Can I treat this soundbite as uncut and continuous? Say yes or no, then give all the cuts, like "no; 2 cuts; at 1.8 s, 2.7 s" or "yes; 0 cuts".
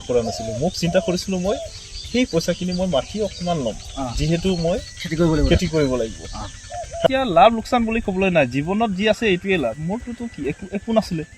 no; 1 cut; at 7.1 s